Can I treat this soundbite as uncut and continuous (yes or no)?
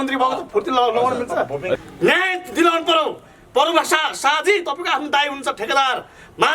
no